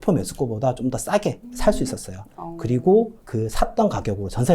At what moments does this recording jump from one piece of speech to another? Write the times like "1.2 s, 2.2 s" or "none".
1.5 s, 3.2 s